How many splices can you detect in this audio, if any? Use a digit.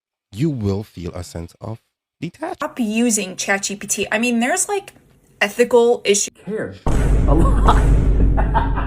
2